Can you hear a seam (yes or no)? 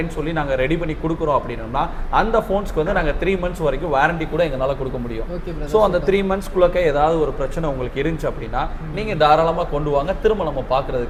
no